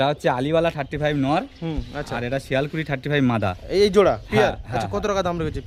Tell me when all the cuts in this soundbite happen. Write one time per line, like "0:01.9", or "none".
none